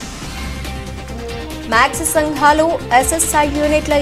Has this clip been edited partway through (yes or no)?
no